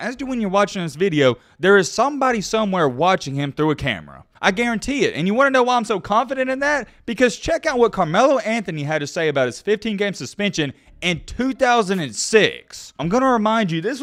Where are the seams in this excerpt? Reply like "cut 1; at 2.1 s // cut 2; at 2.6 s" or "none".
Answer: none